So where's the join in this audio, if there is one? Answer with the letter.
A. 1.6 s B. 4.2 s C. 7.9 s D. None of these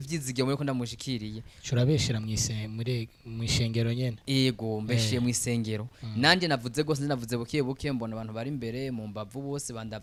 D